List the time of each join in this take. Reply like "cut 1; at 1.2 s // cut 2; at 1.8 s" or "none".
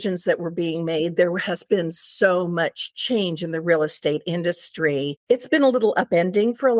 cut 1; at 5.2 s

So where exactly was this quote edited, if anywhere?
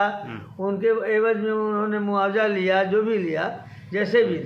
none

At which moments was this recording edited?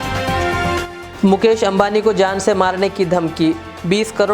cut 1; at 0.9 s

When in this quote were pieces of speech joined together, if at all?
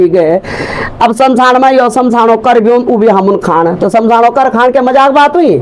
none

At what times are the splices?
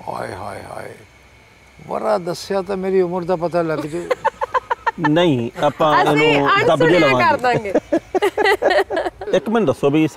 cut 1; at 9.2 s

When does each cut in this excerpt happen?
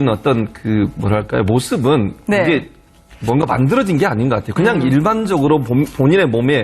cut 1; at 5.1 s

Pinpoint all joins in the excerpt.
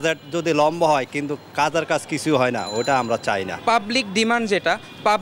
cut 1; at 3.5 s

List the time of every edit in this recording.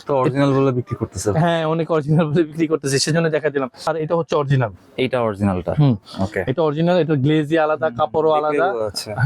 cut 1; at 3.9 s

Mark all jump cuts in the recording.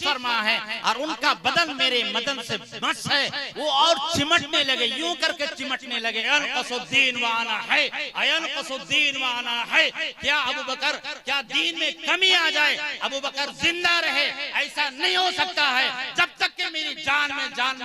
cut 1; at 6.3 s

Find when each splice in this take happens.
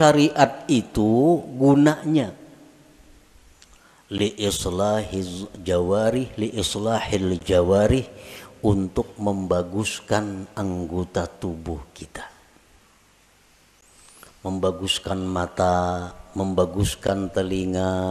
none

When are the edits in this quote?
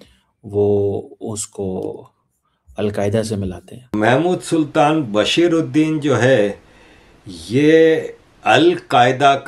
cut 1; at 3.8 s

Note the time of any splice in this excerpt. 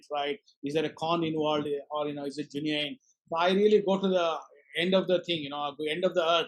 none

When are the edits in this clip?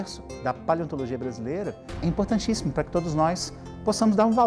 cut 1; at 2.0 s

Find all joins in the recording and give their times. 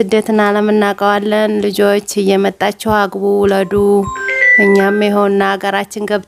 none

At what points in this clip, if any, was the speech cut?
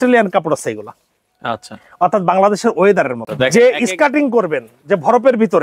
cut 1; at 3.3 s

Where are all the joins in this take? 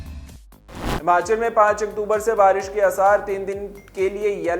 cut 1; at 1.0 s

